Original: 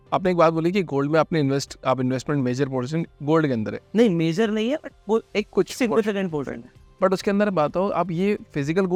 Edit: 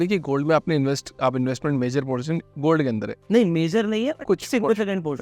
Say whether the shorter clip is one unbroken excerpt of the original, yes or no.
no